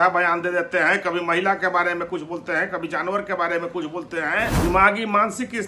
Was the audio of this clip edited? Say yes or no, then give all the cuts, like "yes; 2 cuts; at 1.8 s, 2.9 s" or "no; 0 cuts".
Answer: yes; 1 cut; at 4.5 s